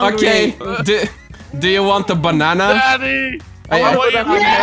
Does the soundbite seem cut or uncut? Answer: uncut